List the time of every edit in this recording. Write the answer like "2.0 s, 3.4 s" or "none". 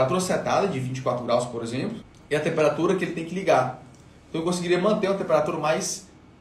none